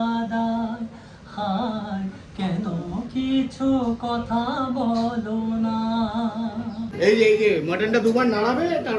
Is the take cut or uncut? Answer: cut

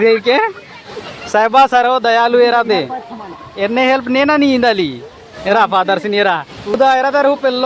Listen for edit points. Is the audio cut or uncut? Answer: cut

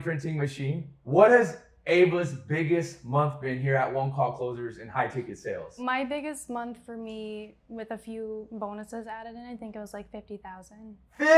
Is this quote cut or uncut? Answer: cut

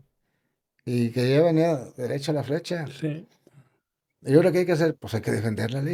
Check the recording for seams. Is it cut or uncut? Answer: uncut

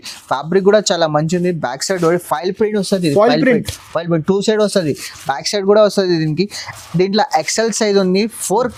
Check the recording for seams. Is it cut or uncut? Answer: uncut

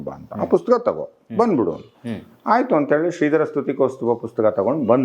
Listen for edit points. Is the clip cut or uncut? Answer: uncut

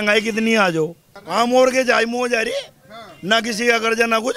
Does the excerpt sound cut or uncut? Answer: cut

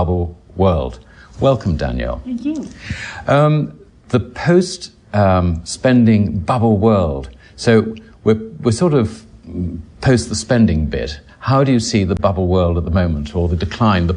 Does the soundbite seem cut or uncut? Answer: cut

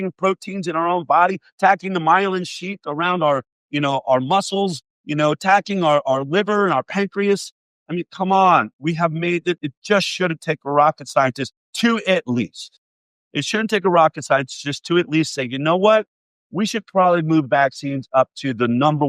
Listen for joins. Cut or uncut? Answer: cut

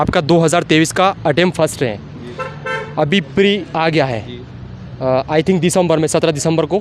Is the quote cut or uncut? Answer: uncut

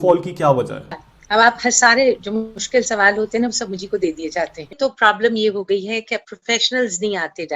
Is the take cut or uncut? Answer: cut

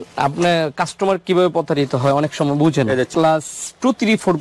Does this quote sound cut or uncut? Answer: cut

